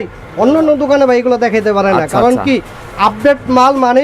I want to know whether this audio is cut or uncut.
uncut